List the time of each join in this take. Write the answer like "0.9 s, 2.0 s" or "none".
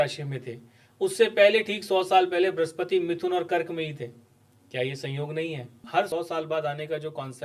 6.0 s